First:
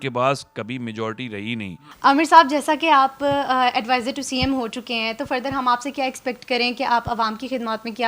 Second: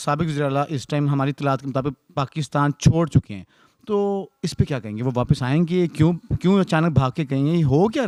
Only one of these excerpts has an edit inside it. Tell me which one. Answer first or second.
first